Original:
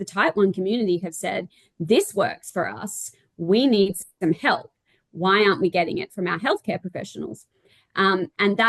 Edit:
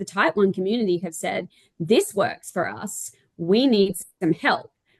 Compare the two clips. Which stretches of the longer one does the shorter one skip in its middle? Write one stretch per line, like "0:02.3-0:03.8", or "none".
none